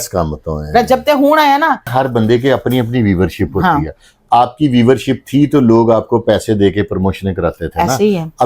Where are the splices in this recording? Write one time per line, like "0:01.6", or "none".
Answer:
0:01.9

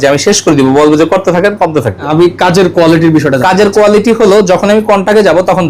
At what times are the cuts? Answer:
0:02.1

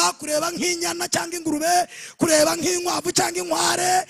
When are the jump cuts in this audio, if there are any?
none

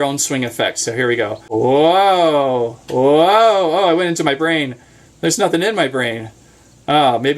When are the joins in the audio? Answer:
0:01.5

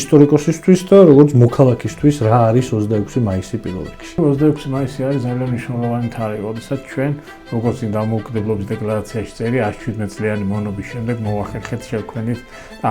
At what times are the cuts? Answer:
0:04.2

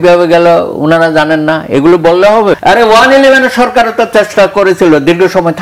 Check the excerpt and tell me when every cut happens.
0:02.6

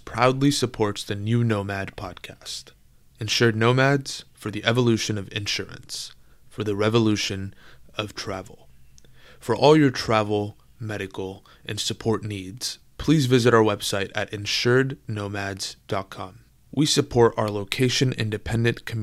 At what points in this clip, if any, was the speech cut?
none

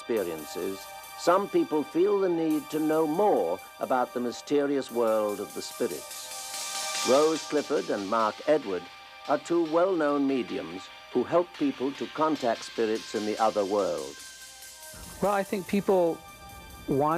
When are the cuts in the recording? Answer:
0:07.7

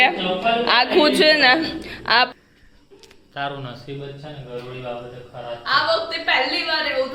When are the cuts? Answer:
0:02.3

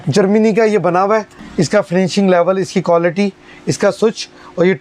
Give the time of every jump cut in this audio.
0:01.4

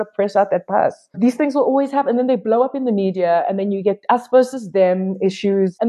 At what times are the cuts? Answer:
none

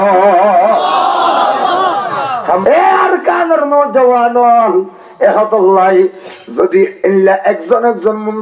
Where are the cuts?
0:02.6

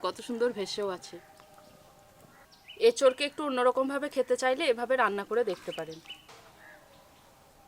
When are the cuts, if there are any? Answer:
0:02.5
0:06.2

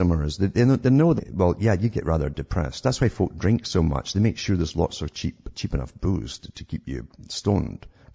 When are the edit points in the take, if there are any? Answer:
none

